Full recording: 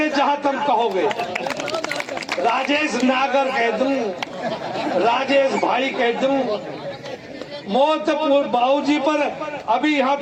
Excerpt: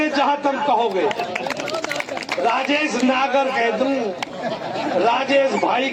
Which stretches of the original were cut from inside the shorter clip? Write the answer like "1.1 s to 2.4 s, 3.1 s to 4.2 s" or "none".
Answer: none